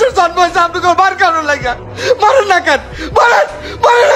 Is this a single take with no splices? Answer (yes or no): yes